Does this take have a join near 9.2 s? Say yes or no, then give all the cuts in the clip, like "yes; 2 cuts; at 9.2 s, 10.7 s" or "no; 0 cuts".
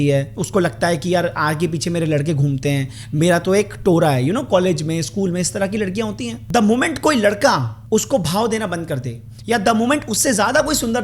no; 2 cuts; at 6.3 s, 7.7 s